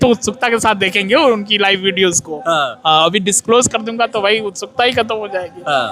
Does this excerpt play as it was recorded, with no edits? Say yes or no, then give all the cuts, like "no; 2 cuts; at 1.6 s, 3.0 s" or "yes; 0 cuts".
yes; 0 cuts